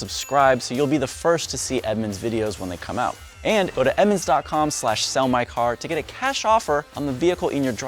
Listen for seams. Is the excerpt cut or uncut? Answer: cut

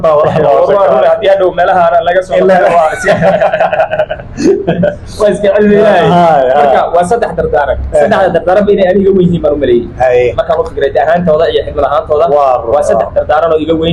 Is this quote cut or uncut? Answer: uncut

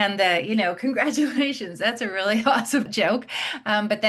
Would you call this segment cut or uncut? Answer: cut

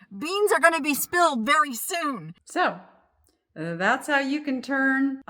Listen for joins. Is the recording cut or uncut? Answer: cut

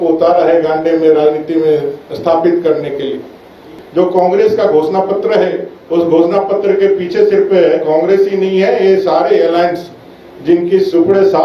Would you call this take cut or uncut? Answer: cut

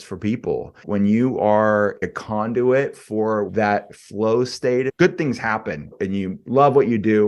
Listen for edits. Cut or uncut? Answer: cut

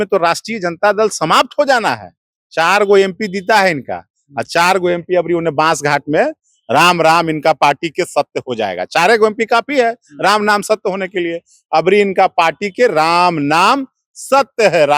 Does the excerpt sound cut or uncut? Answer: uncut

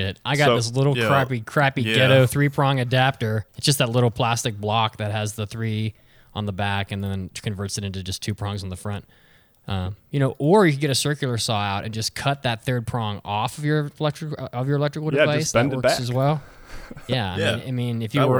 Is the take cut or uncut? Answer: cut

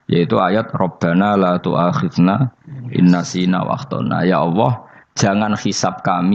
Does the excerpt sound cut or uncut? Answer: uncut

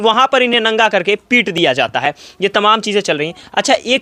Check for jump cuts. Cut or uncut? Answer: uncut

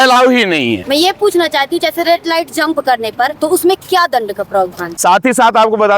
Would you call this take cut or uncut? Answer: cut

